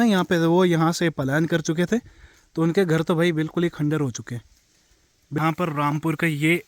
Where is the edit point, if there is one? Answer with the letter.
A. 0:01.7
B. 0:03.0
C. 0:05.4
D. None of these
C